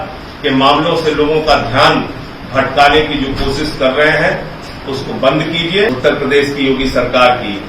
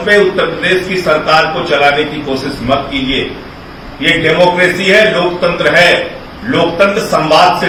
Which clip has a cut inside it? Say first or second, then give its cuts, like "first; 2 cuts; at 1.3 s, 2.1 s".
first; 1 cut; at 5.9 s